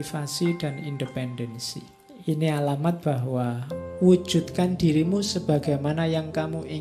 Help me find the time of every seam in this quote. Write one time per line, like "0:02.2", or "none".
0:01.5

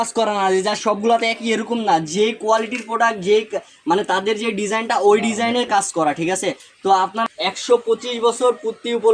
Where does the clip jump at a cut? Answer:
0:07.2

